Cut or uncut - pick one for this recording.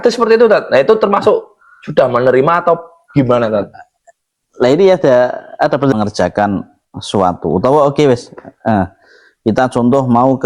cut